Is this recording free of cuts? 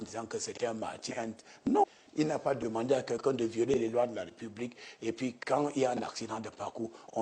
no; 1 cut; at 1.8 s

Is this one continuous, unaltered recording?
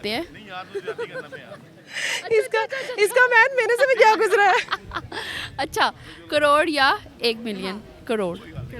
yes; 0 cuts

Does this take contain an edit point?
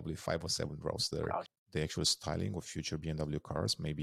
yes; 1 cut; at 1.5 s

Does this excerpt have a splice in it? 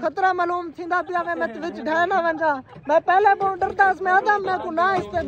no; 0 cuts

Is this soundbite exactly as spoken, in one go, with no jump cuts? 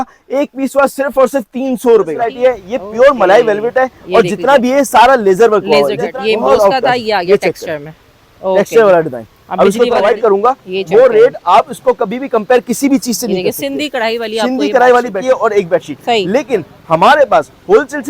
no; 4 cuts; at 2.2 s, 6.1 s, 10.0 s, 15.1 s

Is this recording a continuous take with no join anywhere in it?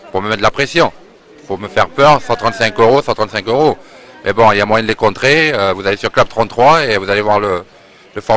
yes; 0 cuts

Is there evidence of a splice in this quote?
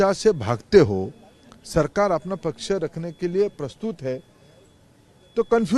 no; 0 cuts

